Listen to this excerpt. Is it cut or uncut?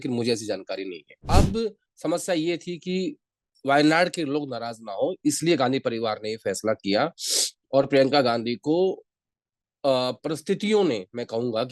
cut